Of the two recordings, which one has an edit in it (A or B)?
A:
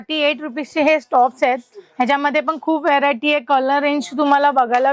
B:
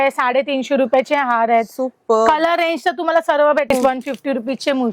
B